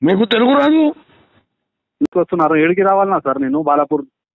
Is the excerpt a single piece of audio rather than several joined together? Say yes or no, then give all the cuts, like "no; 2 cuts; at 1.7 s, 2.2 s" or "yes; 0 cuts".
no; 1 cut; at 2.1 s